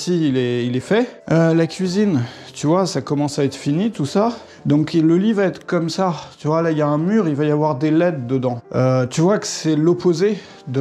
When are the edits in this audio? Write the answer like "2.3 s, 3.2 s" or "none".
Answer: 1.2 s, 4.5 s, 8.6 s